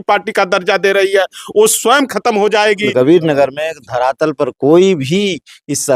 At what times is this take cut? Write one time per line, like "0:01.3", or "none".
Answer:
0:02.9